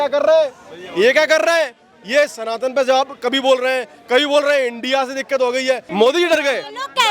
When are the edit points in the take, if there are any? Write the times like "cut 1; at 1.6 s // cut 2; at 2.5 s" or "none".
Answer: cut 1; at 5.9 s